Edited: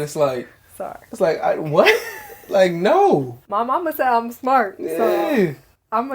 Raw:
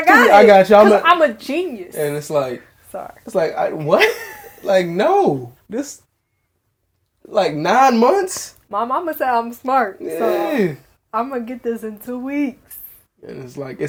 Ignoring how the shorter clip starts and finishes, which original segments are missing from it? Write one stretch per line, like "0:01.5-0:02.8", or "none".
0:05.5-0:08.6